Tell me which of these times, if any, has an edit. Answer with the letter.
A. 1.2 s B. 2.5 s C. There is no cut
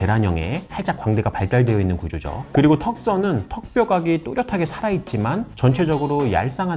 C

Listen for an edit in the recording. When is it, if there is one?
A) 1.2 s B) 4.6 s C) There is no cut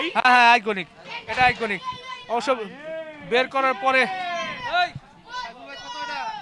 C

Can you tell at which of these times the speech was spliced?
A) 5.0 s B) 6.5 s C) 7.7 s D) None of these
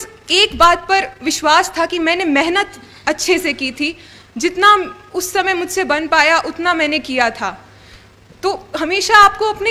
D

